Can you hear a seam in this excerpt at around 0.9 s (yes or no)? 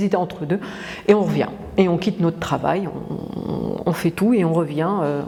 no